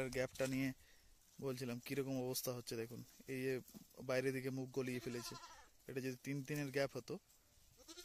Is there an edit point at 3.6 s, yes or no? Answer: no